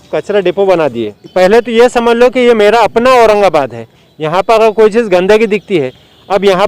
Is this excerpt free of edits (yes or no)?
no